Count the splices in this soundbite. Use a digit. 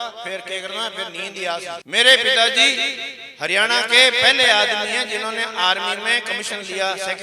1